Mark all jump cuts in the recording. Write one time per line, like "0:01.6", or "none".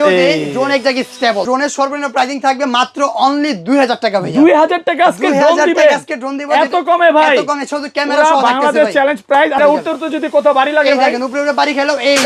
0:01.5
0:09.6